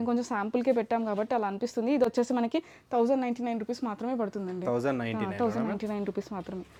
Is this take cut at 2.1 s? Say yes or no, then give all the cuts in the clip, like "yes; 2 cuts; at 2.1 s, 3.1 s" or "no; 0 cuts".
no; 0 cuts